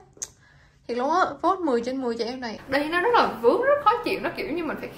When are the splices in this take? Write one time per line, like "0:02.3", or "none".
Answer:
0:02.6